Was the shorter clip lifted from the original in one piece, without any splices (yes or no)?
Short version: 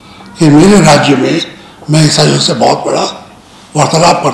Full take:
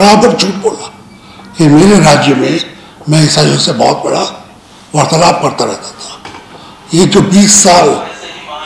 yes